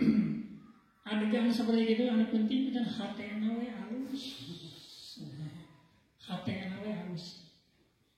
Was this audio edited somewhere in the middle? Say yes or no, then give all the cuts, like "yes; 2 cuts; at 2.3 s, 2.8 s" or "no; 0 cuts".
no; 0 cuts